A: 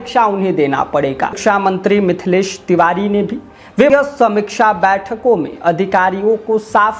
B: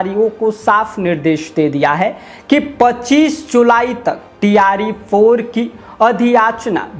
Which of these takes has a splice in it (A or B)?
A